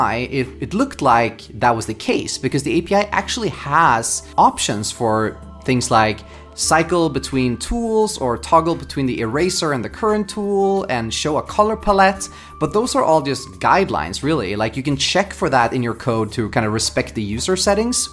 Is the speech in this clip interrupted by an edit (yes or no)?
no